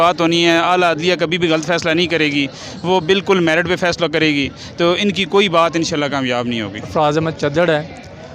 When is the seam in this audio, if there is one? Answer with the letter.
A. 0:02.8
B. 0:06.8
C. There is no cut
B